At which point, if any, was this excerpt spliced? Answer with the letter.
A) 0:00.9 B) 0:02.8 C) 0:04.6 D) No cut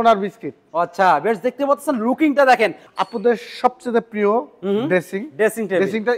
B